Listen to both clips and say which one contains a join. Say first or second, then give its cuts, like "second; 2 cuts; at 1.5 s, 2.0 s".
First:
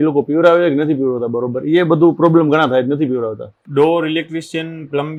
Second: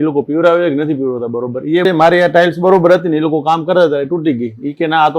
second; 1 cut; at 1.8 s